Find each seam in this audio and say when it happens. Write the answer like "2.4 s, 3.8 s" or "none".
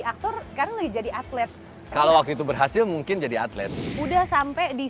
3.8 s